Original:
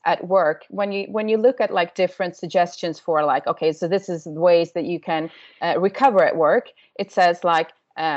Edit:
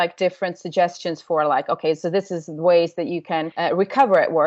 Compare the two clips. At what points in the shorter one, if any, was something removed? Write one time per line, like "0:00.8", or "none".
0:03.5